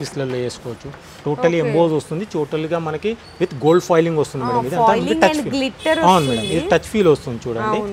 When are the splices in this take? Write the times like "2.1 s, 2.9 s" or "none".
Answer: none